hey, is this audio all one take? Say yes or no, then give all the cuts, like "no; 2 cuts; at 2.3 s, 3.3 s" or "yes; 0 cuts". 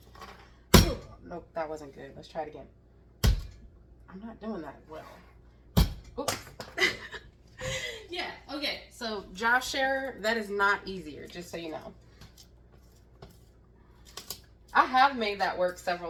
yes; 0 cuts